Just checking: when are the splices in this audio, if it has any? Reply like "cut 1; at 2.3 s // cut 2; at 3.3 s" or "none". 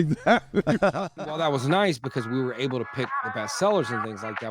cut 1; at 1.5 s